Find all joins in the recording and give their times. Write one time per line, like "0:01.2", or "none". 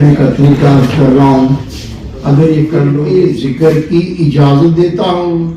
0:03.0

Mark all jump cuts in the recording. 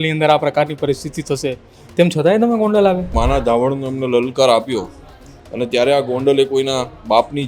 0:03.1

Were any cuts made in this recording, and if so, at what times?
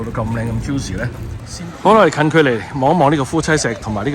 0:01.5

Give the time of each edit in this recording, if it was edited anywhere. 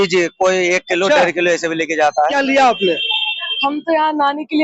0:02.3

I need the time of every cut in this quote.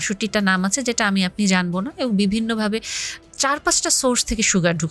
none

